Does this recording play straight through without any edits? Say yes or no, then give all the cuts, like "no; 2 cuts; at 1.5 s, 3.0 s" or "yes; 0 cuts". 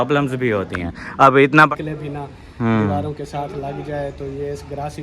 no; 1 cut; at 1.7 s